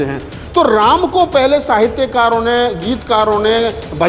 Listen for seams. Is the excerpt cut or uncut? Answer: uncut